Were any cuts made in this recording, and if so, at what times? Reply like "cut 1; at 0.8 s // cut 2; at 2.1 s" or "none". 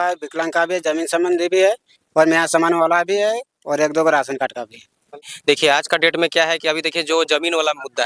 cut 1; at 5.2 s